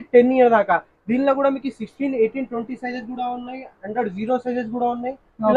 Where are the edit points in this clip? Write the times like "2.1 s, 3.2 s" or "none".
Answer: none